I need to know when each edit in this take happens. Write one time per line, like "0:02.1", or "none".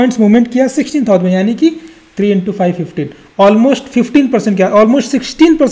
none

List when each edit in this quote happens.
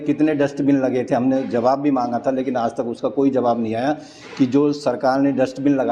none

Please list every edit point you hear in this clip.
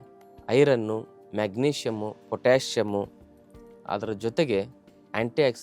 none

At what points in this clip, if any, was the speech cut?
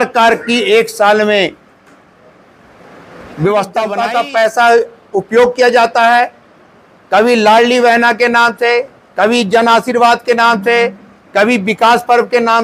0:04.0

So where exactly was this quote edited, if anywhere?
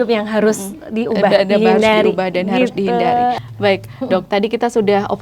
none

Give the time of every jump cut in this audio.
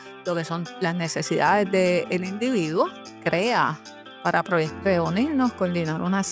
0:03.1
0:04.7

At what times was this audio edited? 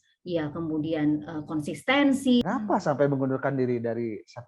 0:02.4

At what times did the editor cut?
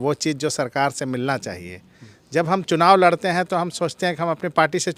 none

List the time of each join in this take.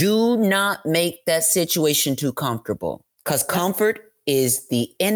0:03.1

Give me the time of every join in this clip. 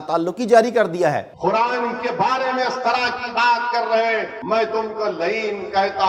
0:01.3
0:04.3

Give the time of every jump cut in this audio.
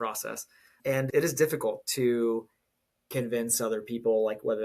0:01.0

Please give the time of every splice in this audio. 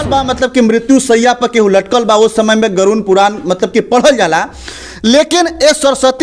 none

